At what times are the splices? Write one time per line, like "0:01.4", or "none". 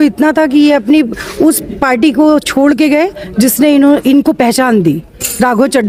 none